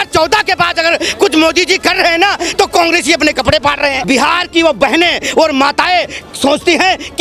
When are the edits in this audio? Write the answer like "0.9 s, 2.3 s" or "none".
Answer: 4.0 s